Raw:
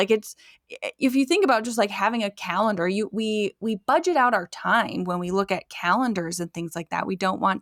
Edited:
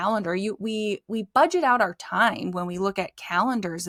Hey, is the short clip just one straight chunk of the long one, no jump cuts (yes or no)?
yes